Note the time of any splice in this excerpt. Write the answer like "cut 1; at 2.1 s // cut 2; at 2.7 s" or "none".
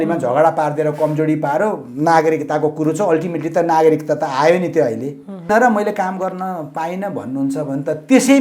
cut 1; at 5.5 s